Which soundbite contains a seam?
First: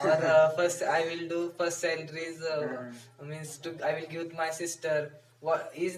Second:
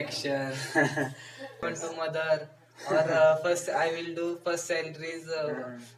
second; 1 cut; at 1.6 s

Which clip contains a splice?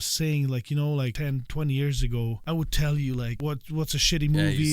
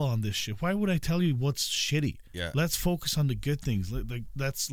first; 3 cuts; at 1.1 s, 2.4 s, 3.3 s

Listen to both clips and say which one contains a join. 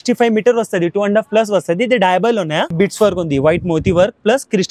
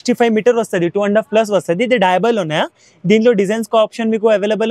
first; 1 cut; at 2.7 s

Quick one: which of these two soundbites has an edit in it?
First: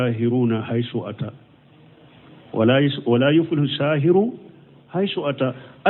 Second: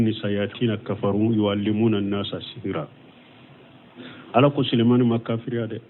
second; 1 cut; at 0.9 s

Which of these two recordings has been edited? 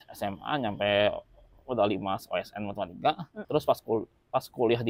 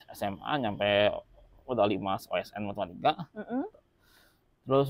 first; 1 cut; at 3.3 s

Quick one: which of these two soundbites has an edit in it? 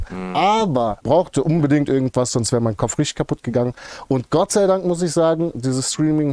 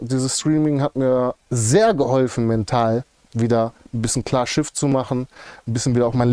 first; 1 cut; at 1.0 s

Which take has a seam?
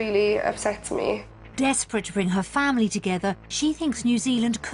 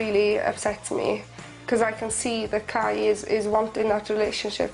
first; 1 cut; at 1.2 s

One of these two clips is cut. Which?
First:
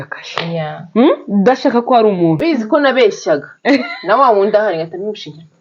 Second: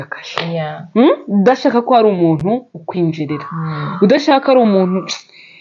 first; 1 cut; at 2.4 s

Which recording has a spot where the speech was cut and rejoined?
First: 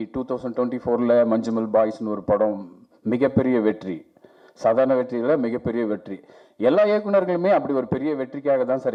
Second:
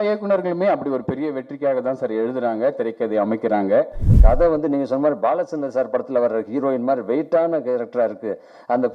second; 1 cut; at 4.1 s

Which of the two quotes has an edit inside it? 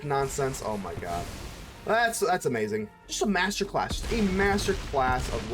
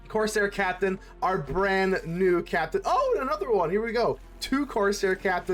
first; 1 cut; at 3.0 s

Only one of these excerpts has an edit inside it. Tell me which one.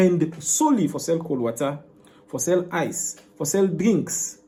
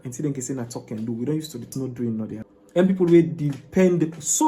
second; 2 cuts; at 1.7 s, 2.6 s

